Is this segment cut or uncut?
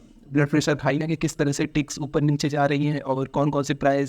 cut